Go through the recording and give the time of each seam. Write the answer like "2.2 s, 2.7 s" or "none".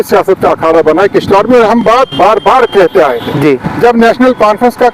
none